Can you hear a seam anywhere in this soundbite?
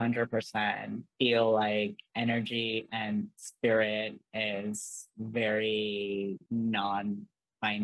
yes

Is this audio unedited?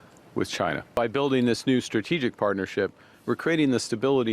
no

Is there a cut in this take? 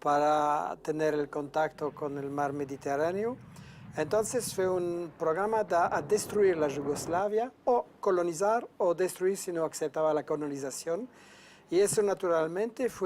yes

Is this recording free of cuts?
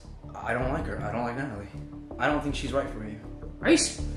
no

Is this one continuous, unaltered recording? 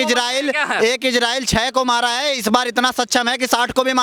yes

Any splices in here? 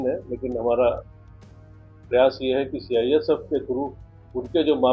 no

